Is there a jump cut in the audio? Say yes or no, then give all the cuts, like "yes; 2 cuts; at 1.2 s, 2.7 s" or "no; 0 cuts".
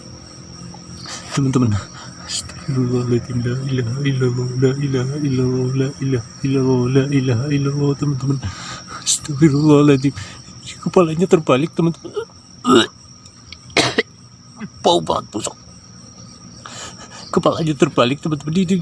no; 0 cuts